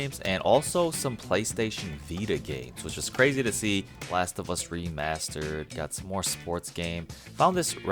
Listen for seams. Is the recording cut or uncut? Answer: cut